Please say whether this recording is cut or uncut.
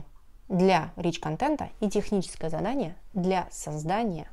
uncut